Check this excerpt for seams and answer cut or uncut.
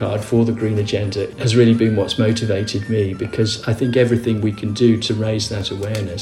cut